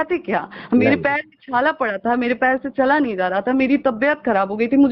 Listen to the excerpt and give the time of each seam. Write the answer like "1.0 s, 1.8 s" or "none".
none